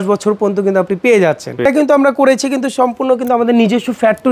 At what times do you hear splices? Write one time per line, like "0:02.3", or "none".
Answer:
0:01.6